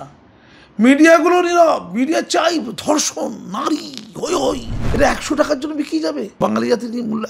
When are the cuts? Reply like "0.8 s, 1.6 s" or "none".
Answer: 4.8 s, 6.3 s